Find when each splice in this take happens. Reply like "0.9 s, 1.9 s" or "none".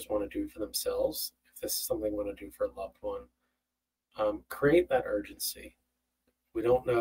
none